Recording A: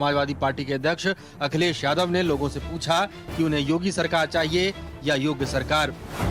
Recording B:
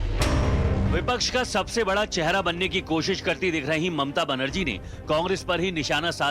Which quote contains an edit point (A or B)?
B